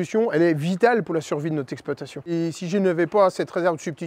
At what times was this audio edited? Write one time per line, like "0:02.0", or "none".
0:02.2